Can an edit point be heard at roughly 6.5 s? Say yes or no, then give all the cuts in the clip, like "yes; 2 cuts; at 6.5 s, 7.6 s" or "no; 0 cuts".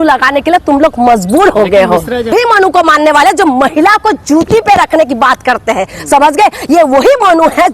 no; 1 cut; at 2.3 s